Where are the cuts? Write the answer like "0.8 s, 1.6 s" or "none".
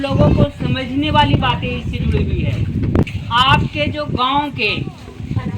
3.2 s